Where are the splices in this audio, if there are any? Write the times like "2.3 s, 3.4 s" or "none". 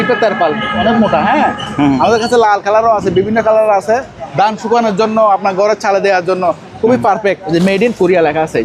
4.2 s, 7.4 s